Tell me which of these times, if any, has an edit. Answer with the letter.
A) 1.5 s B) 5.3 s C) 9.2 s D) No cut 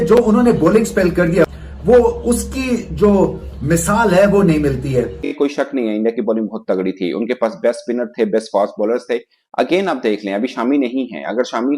B